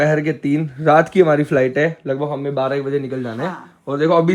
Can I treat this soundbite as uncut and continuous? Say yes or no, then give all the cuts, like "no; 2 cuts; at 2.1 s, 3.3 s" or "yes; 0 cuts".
yes; 0 cuts